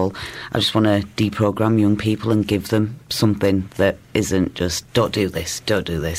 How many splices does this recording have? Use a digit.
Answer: 0